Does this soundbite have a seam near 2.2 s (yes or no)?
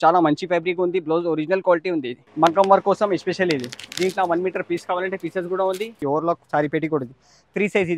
yes